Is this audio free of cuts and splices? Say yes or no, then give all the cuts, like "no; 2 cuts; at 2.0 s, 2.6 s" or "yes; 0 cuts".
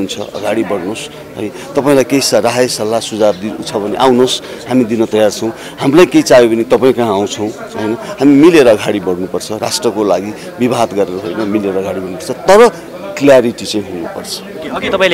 yes; 0 cuts